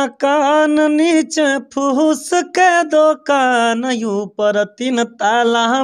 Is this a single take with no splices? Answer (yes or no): yes